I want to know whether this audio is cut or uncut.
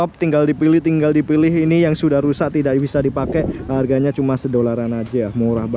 uncut